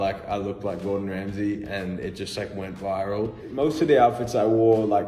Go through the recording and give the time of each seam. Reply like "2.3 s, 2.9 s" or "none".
3.4 s